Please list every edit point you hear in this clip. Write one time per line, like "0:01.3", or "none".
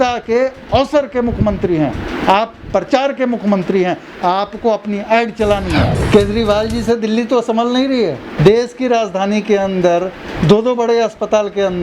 0:06.0
0:08.3